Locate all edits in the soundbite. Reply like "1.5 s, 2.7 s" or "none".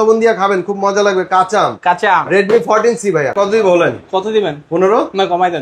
3.3 s